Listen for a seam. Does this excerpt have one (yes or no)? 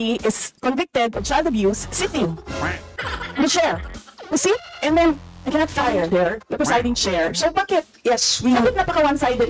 no